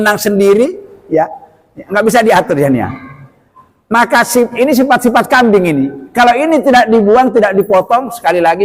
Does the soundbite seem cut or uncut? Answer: uncut